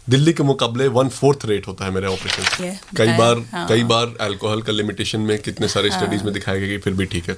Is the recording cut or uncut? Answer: cut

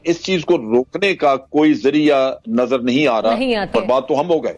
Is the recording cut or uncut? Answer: cut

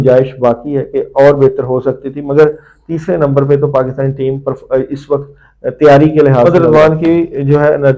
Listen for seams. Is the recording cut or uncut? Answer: cut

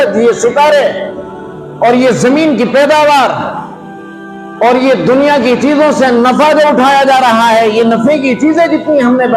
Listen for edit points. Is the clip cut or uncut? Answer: uncut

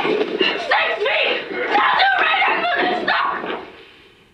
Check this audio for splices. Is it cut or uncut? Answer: uncut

